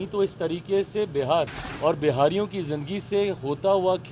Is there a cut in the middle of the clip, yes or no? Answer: yes